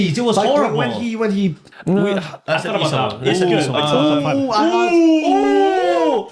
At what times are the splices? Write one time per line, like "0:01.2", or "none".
0:01.7